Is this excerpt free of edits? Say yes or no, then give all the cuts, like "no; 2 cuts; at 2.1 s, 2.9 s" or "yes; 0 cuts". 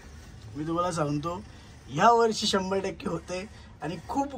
yes; 0 cuts